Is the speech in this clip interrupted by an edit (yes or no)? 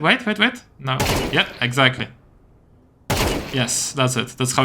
no